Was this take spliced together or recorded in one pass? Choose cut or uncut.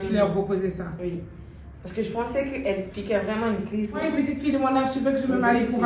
cut